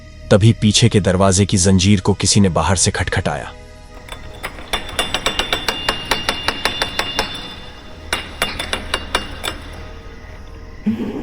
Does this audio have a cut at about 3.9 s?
no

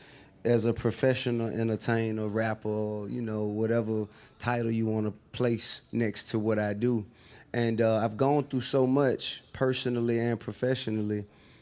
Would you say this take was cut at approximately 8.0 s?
yes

